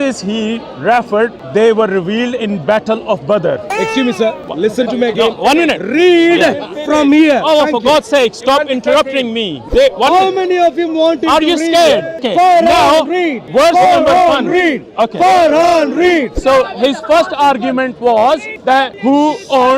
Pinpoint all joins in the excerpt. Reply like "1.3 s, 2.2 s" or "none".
1.4 s, 4.5 s, 9.6 s, 12.2 s, 13.4 s, 16.3 s, 18.8 s